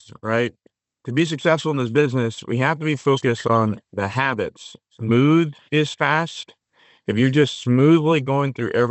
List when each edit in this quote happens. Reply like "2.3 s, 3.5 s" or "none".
4.9 s